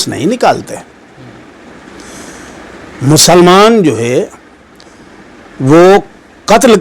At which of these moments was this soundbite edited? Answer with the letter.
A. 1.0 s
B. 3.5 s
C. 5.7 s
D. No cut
D